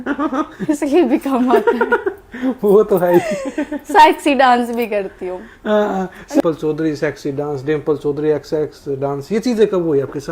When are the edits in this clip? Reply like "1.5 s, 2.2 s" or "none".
6.4 s

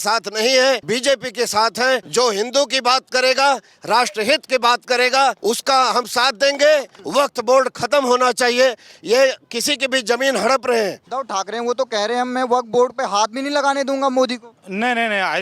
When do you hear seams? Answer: 0.8 s, 2.1 s, 5.4 s, 7.0 s, 11.1 s

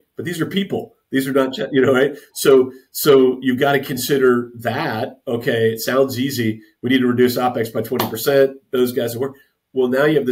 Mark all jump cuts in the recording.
none

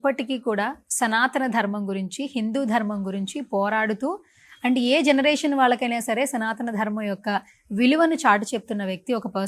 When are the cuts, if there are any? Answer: none

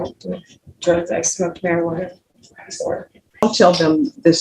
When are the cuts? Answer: 3.4 s

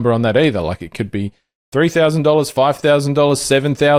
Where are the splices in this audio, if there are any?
none

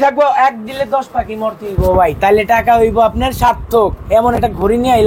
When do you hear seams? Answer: none

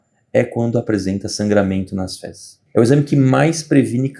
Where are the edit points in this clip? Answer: 2.6 s

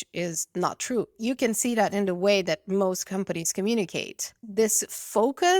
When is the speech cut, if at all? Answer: 1.1 s, 4.3 s

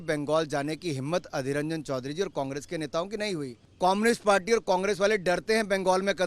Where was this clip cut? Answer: 3.6 s

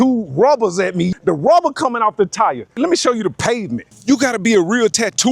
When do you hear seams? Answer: 1.1 s, 2.7 s, 3.9 s

